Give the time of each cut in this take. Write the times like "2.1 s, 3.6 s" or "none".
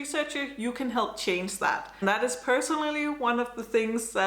1.9 s